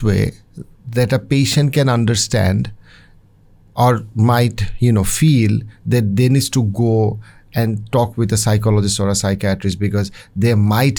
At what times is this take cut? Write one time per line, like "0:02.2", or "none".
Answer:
none